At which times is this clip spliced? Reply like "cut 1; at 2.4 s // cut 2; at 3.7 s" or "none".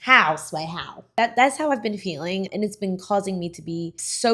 cut 1; at 1.1 s // cut 2; at 2.5 s